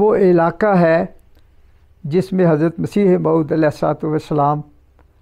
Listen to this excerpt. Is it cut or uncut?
uncut